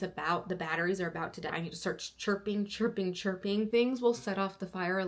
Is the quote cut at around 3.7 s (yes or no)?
yes